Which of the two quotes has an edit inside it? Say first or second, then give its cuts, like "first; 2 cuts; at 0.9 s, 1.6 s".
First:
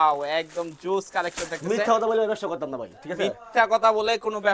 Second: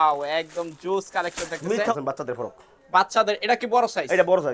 second; 1 cut; at 1.9 s